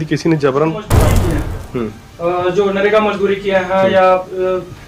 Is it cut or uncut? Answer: cut